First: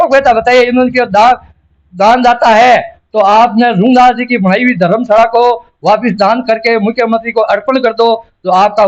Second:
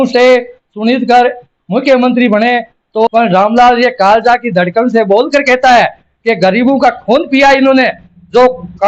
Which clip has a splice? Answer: second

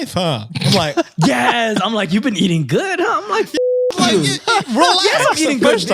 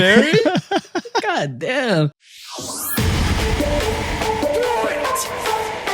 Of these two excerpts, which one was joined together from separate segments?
second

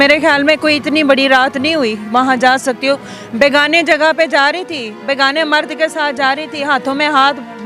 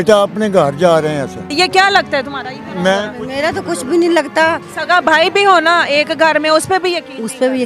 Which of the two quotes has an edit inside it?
second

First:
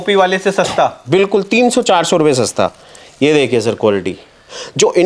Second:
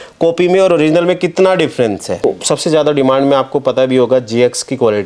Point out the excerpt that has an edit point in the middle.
second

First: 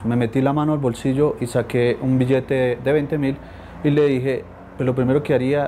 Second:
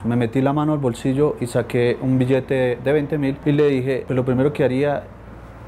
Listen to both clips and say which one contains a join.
second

